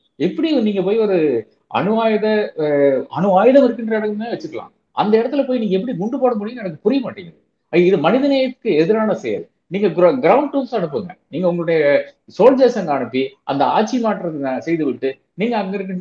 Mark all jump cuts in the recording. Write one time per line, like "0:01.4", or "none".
none